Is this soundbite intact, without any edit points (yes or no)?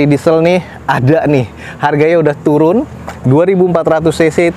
yes